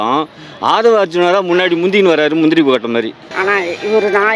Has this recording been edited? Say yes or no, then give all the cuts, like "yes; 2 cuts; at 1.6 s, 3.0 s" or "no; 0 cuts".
yes; 1 cut; at 3.2 s